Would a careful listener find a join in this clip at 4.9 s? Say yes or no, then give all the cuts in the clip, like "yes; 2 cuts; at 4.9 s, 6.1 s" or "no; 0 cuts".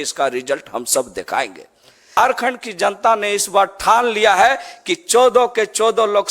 no; 1 cut; at 2.2 s